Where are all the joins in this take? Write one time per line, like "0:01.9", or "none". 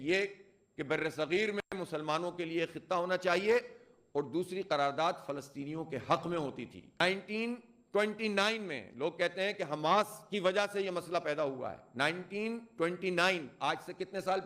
0:07.0